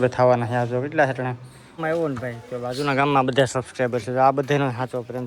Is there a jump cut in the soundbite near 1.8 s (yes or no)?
yes